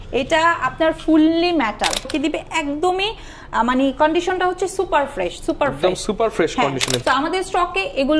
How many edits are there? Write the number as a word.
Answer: two